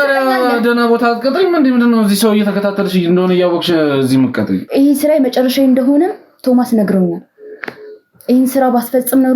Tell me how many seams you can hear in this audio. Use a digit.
1